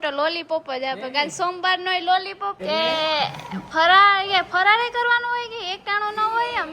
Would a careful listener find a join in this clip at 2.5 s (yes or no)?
yes